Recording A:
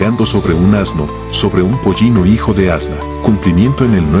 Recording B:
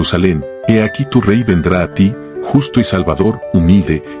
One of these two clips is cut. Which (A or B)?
A